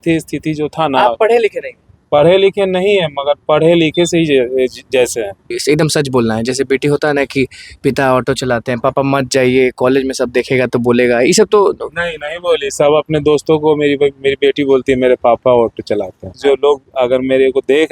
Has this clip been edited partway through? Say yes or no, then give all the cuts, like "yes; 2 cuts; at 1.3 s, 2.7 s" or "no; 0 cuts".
yes; 2 cuts; at 5.6 s, 16.4 s